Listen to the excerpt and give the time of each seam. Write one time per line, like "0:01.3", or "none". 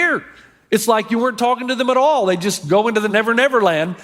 0:03.1

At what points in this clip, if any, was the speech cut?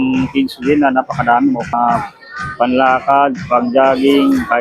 0:01.7

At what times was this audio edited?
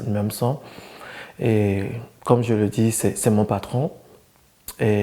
none

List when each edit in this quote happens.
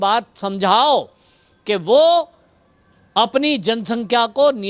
none

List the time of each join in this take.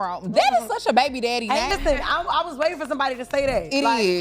0:01.7

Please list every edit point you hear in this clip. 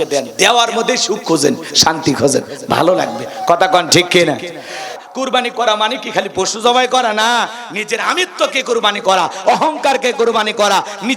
0:05.0

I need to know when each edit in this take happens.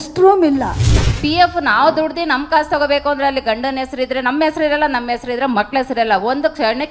0:00.9

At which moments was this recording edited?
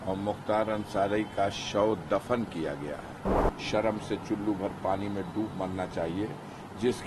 0:03.4

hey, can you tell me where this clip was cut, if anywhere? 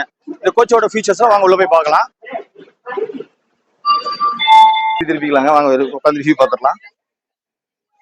0:05.1

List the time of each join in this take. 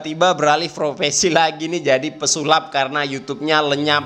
none

